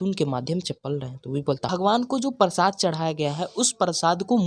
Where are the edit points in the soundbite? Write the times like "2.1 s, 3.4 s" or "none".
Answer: 1.6 s